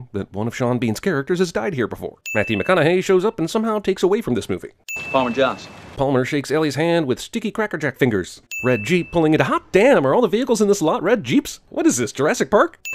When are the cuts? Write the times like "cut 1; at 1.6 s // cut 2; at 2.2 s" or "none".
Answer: cut 1; at 6.6 s